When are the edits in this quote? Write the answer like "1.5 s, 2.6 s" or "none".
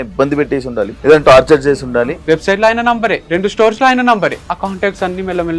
0.9 s, 2.1 s, 3.2 s, 4.4 s